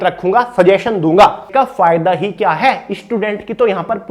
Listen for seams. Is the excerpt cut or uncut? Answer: cut